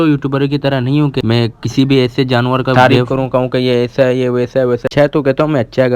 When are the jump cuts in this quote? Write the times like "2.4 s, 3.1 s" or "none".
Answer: 1.2 s, 2.6 s, 4.8 s